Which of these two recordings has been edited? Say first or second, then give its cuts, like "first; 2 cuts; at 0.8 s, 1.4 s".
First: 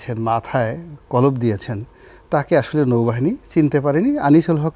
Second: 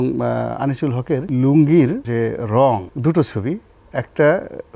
second; 3 cuts; at 1.3 s, 2.0 s, 2.9 s